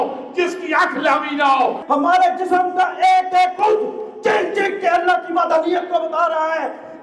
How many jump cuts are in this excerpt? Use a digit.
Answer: 1